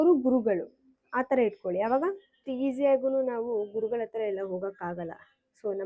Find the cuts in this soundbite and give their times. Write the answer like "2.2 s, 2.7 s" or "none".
2.4 s